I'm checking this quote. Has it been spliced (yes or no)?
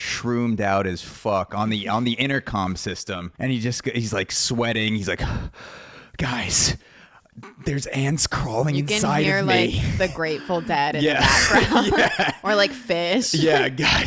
yes